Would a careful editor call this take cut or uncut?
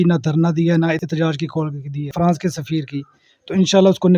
cut